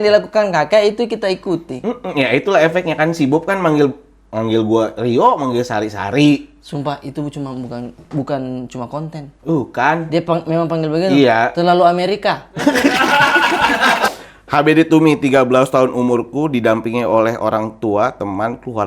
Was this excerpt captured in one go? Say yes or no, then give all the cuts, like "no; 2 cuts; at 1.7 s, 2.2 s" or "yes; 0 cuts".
no; 1 cut; at 14.0 s